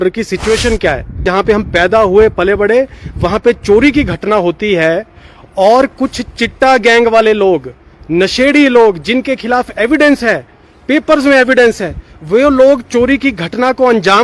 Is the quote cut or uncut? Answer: cut